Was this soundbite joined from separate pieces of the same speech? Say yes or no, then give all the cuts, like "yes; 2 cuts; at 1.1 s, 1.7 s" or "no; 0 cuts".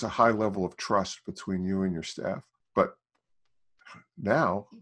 yes; 1 cut; at 2.5 s